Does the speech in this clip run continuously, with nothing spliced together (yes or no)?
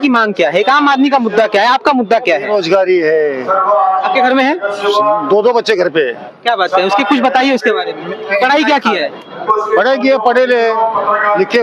yes